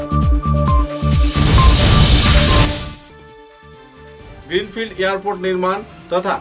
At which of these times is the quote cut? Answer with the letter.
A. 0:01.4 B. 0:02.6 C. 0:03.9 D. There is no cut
B